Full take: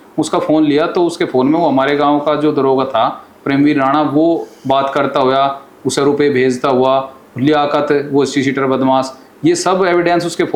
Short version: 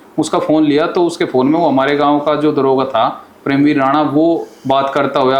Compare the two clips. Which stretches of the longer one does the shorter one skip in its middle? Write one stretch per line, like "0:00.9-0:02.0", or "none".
none